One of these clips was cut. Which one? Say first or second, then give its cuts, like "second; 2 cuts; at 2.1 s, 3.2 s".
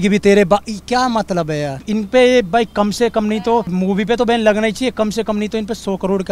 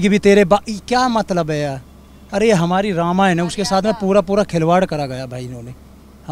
first; 2 cuts; at 1.8 s, 3.7 s